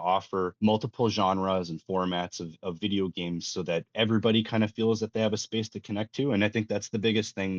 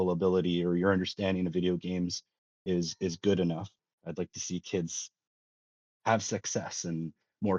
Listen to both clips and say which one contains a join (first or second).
second